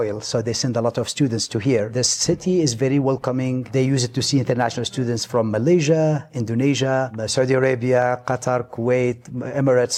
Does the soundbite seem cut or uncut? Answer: uncut